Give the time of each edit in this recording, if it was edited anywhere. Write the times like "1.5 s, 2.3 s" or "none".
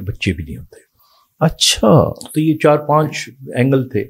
none